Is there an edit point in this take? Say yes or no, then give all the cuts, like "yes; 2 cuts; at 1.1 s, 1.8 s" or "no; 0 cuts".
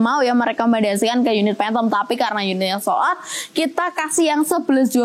no; 0 cuts